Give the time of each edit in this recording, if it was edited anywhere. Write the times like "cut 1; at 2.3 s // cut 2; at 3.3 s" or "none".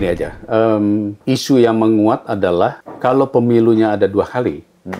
cut 1; at 1.1 s // cut 2; at 2.9 s